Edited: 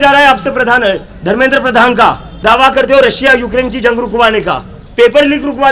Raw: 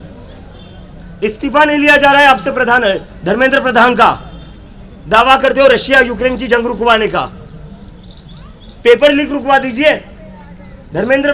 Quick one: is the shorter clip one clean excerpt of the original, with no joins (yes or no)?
no